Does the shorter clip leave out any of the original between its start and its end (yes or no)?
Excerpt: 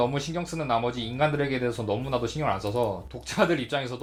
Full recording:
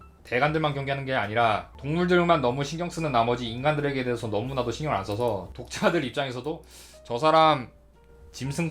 no